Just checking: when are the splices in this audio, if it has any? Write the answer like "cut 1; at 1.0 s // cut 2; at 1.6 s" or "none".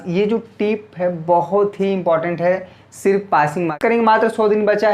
cut 1; at 3.7 s